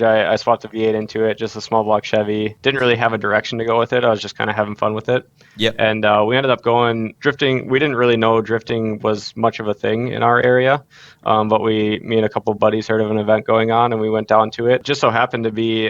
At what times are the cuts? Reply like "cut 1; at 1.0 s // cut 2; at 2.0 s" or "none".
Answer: cut 1; at 2.5 s // cut 2; at 7.1 s // cut 3; at 14.8 s